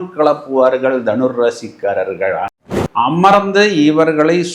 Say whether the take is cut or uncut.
cut